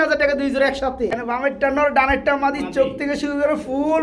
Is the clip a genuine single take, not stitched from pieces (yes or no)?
no